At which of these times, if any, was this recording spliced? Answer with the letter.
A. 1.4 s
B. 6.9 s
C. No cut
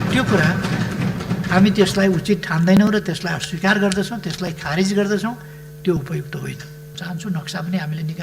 B